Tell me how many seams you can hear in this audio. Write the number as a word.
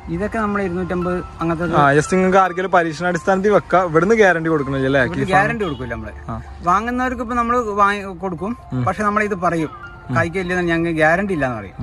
zero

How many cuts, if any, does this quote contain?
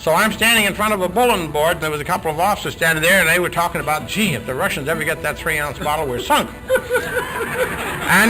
one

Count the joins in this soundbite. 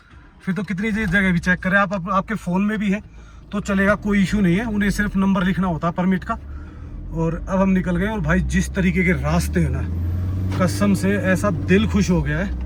zero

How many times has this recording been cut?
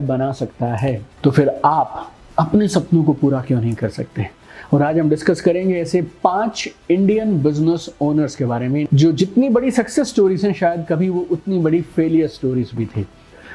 two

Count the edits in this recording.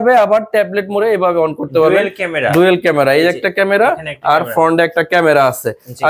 zero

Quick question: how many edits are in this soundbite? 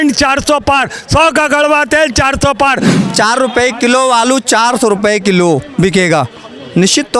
one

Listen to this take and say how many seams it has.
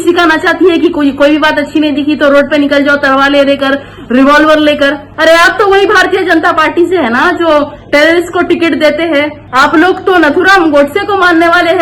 two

